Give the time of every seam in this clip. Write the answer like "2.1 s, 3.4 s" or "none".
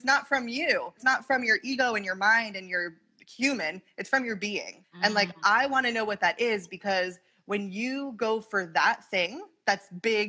1.0 s, 4.8 s